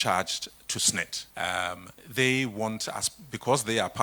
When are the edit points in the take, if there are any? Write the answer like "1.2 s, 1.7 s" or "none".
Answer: 1.2 s, 1.9 s

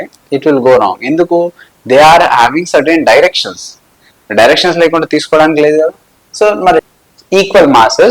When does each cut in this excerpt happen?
6.8 s

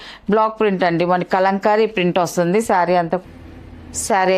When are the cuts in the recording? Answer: 3.2 s

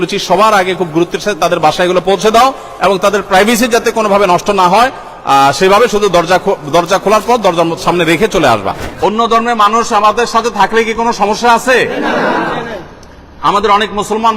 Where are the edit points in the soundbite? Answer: 8.9 s

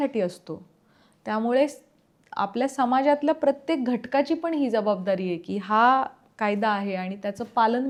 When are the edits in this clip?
none

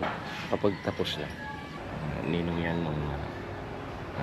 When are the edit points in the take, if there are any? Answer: 1.7 s

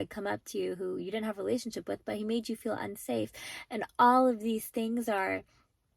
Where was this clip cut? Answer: none

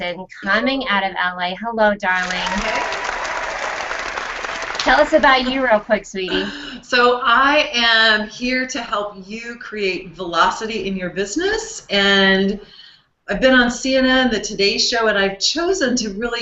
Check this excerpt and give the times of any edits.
none

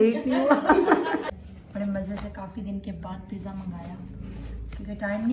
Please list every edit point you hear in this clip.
1.3 s

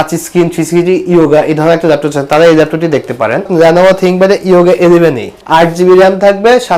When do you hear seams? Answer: 3.5 s, 5.3 s

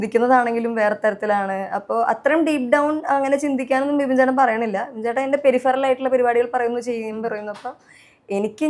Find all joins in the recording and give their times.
none

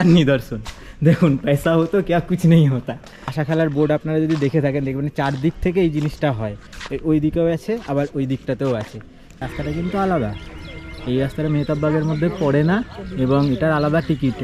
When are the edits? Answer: 3.3 s, 9.4 s

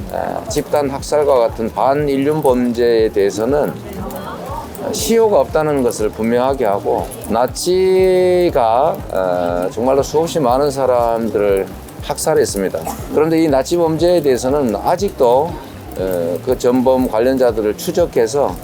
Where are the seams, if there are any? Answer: 7.2 s, 13.1 s

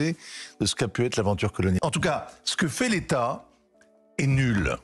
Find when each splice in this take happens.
1.8 s

